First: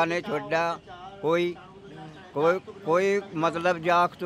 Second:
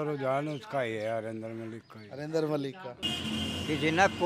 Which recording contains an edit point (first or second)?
second